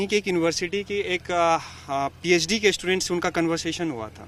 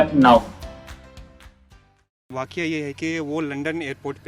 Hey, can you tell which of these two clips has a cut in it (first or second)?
second